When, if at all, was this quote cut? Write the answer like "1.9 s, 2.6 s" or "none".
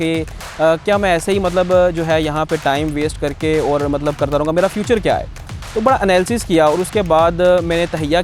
none